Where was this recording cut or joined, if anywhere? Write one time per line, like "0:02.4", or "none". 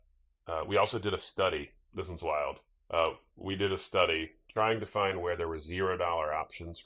0:01.8
0:02.7
0:04.4